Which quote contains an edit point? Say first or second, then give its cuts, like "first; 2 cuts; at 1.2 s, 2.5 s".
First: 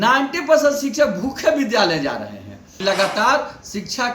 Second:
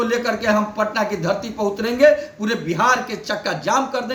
first; 1 cut; at 2.6 s